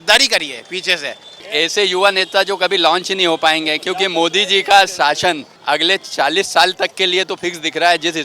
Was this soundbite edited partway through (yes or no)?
yes